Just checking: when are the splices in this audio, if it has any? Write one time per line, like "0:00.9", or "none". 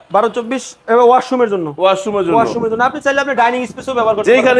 none